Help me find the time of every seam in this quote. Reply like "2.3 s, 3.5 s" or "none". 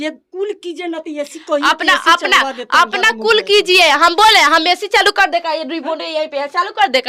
none